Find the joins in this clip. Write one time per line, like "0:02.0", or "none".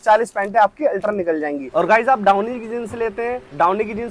none

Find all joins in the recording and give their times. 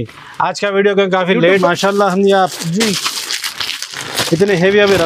0:01.6

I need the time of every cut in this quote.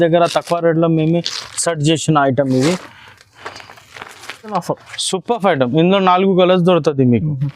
0:04.5

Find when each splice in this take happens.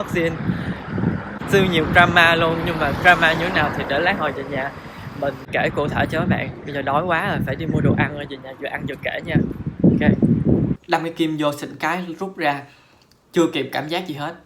0:01.3
0:05.4
0:10.8

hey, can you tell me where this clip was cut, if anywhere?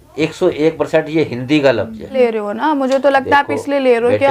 0:02.1

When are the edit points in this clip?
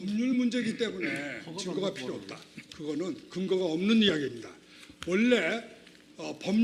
none

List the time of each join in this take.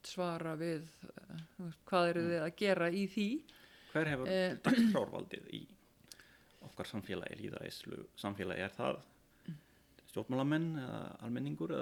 none

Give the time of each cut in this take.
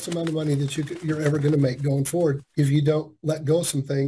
0:02.4

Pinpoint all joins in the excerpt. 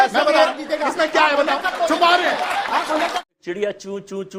0:03.2

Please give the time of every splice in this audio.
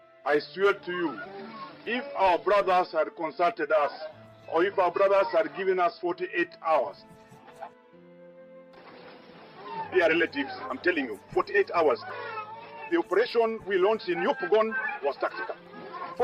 none

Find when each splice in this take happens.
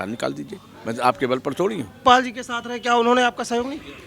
0:01.9

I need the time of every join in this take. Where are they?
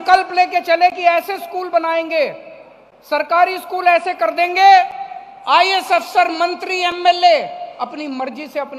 none

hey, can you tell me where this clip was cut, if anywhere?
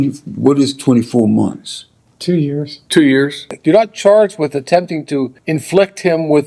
0:03.6
0:05.4

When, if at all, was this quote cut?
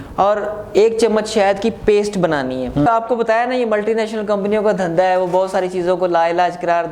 0:02.9

